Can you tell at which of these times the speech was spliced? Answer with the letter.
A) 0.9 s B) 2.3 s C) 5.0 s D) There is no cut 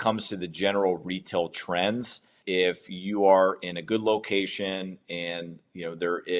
B